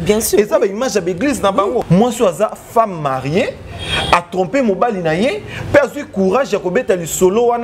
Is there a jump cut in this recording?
yes; 1 cut; at 1.8 s

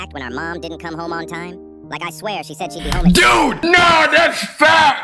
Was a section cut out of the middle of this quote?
no; 0 cuts

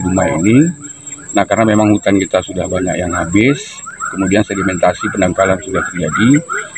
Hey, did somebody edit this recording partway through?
no; 0 cuts

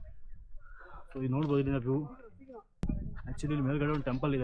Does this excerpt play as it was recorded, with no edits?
no; 1 cut; at 2.7 s

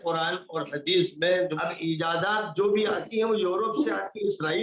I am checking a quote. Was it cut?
yes; 1 cut; at 1.5 s

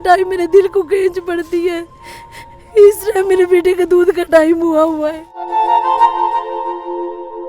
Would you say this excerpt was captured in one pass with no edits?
no; 1 cut; at 5.4 s

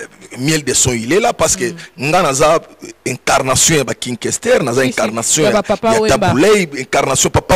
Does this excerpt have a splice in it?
no; 0 cuts

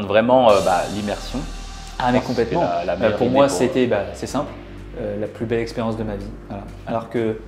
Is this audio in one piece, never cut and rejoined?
yes; 0 cuts

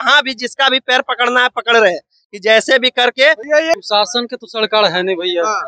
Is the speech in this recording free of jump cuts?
no; 1 cut; at 3.7 s

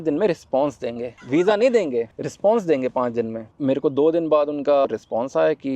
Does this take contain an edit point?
no; 0 cuts

